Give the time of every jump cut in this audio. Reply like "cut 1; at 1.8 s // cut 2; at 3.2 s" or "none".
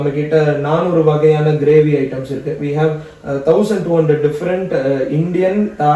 none